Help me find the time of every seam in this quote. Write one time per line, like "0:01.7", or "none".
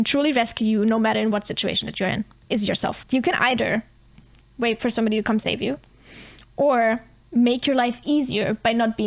0:03.0
0:07.1